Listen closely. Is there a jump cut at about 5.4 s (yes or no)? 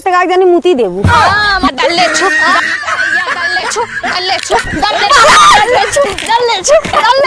no